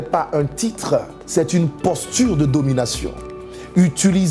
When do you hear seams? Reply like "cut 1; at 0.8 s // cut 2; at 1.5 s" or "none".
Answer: cut 1; at 1.2 s